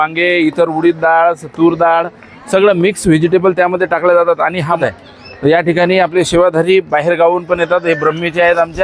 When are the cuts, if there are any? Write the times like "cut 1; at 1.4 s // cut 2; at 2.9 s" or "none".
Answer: cut 1; at 4.8 s